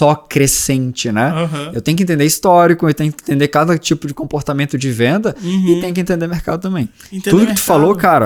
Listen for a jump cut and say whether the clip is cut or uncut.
uncut